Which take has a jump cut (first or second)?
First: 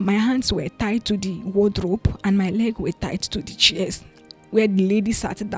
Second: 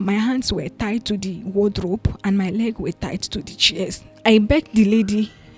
second